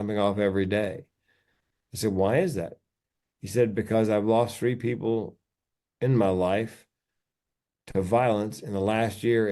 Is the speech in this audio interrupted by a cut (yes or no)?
no